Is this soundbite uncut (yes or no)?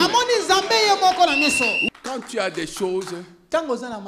no